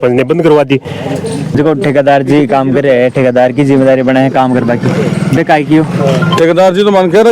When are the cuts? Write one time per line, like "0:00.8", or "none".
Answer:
0:01.5